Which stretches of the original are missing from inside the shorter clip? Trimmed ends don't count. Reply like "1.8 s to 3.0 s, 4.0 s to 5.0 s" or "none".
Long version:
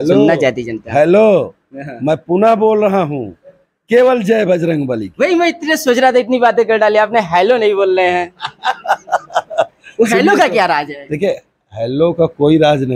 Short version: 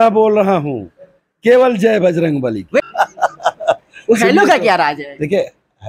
5.3 s to 8.7 s

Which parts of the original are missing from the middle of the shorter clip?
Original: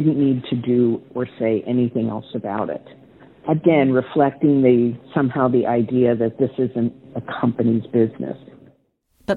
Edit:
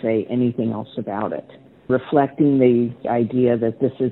3.3 s to 3.9 s, 5.1 s to 5.6 s

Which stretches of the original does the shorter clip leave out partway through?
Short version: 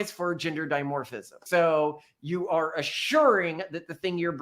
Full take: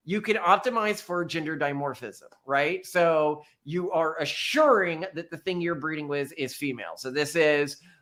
2.3 s to 2.8 s

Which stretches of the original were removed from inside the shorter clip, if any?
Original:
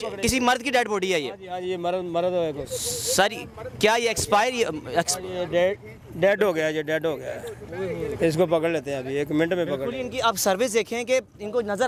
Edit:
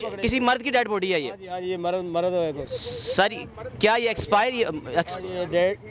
none

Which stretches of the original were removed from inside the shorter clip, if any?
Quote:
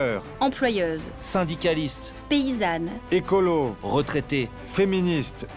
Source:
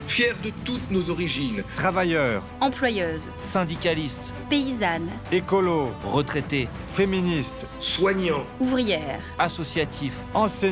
none

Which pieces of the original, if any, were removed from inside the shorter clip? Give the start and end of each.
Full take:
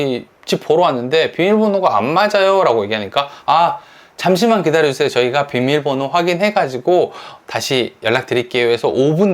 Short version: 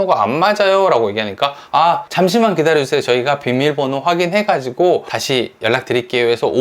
3.8 s to 4.1 s, 7.2 s to 7.5 s

